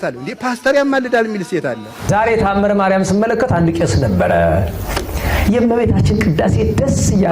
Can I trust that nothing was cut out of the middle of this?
no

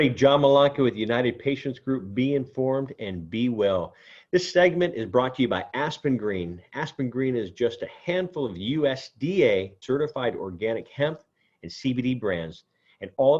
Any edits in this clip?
yes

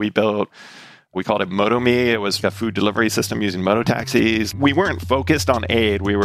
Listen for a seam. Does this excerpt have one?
yes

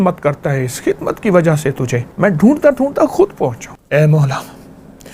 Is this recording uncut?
no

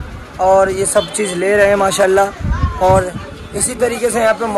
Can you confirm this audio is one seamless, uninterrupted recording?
yes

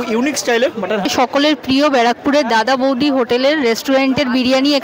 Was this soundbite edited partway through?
yes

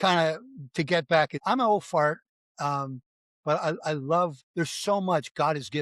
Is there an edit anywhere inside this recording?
yes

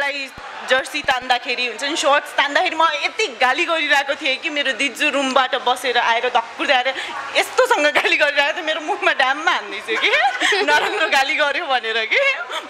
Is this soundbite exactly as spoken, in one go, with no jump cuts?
yes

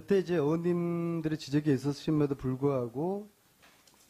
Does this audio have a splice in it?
no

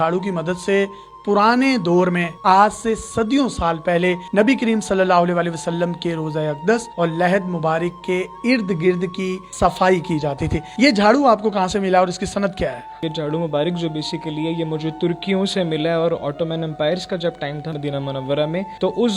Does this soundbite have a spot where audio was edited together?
no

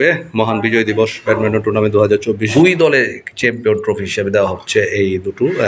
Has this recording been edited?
yes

